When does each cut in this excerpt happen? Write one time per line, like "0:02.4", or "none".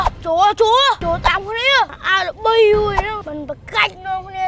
none